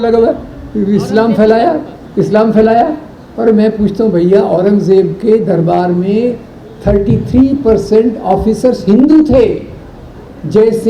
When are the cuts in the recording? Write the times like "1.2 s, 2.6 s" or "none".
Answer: none